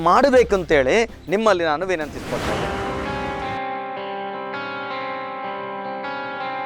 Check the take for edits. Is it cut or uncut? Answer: cut